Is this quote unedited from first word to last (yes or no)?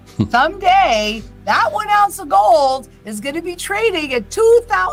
yes